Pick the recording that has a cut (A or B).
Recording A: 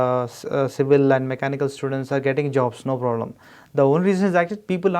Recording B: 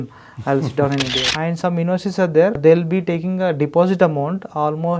B